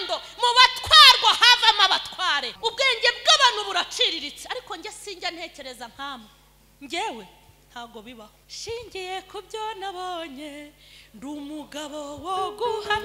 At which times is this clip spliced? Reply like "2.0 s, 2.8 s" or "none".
2.5 s, 8.4 s